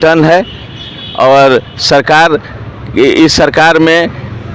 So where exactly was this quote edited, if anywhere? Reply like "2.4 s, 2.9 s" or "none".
none